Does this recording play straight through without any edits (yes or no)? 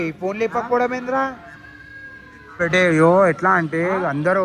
no